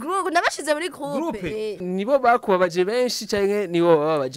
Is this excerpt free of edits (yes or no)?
no